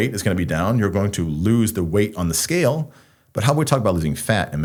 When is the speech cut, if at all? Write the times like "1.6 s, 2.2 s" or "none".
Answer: none